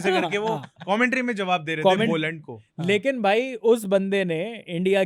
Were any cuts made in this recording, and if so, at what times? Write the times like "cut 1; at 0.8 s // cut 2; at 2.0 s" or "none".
none

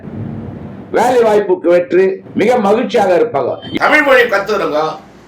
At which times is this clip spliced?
cut 1; at 3.7 s

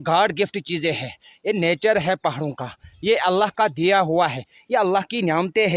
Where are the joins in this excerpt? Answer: none

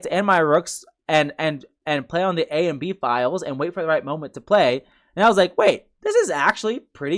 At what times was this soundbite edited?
none

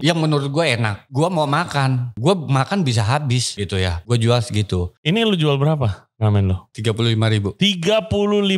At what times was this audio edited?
cut 1; at 1.0 s // cut 2; at 2.1 s // cut 3; at 3.7 s // cut 4; at 4.9 s // cut 5; at 6.7 s

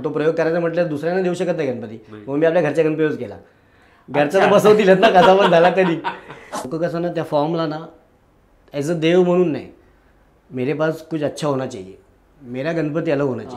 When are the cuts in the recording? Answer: cut 1; at 6.6 s

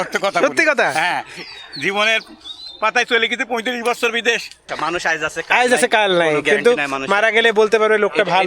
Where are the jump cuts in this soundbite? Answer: cut 1; at 4.7 s

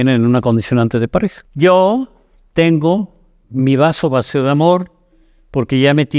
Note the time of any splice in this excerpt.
cut 1; at 1.4 s

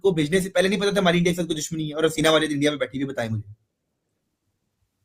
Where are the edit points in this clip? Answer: none

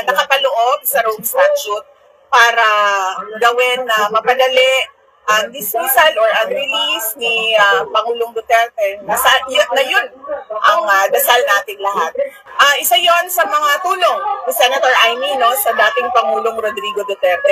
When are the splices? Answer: cut 1; at 12.4 s

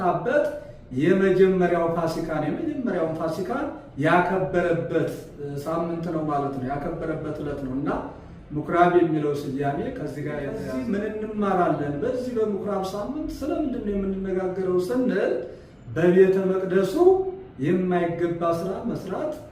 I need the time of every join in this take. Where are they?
cut 1; at 10.6 s

